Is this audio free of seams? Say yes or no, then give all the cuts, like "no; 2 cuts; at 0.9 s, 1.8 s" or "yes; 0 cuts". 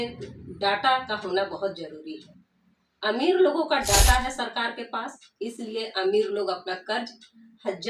yes; 0 cuts